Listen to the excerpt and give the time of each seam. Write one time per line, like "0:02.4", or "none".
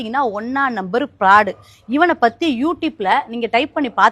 none